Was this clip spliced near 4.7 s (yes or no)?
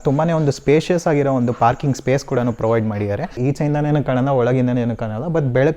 no